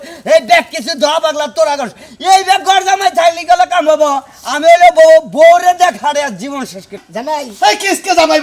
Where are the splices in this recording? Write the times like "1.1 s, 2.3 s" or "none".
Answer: 7.0 s